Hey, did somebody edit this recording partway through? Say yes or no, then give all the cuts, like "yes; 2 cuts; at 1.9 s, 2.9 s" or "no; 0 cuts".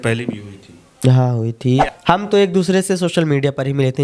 yes; 1 cut; at 1.9 s